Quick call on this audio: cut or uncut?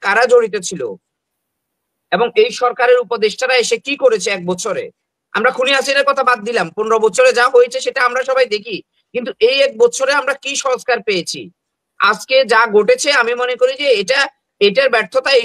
uncut